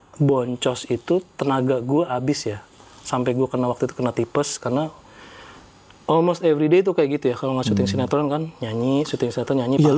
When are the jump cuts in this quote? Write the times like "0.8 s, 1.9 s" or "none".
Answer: none